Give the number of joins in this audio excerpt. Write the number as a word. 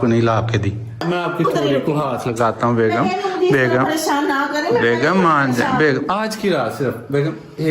one